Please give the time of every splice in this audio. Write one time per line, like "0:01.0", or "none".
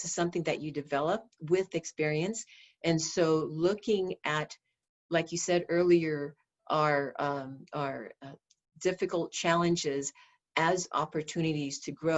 none